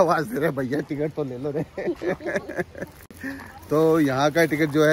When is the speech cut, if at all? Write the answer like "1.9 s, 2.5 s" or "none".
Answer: none